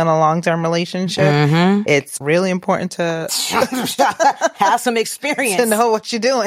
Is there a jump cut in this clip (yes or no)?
yes